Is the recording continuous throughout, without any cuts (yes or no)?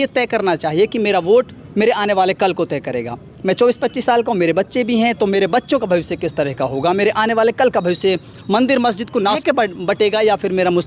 no